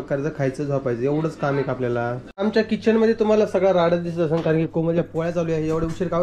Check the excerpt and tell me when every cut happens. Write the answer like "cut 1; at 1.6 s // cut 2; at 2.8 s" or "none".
cut 1; at 2.2 s